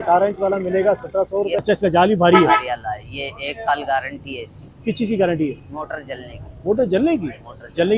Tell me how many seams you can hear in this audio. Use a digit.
1